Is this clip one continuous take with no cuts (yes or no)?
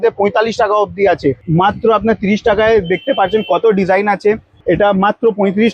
no